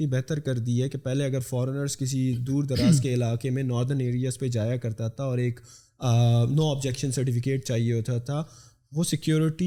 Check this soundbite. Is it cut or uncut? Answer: uncut